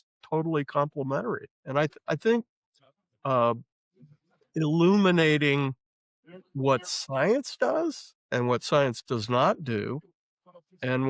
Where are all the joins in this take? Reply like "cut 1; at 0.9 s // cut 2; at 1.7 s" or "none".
cut 1; at 1.5 s